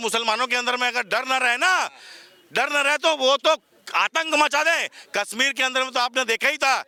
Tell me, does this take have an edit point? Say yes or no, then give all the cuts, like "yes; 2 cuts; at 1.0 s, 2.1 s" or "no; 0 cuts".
no; 0 cuts